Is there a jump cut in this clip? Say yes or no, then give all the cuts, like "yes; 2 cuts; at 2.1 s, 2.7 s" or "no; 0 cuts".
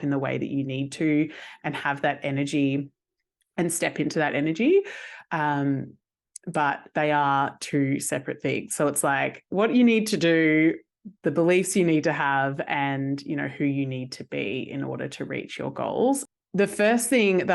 yes; 1 cut; at 16.2 s